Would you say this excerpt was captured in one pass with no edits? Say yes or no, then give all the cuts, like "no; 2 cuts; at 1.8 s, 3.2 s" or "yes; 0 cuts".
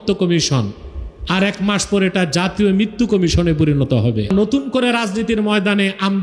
no; 1 cut; at 4.3 s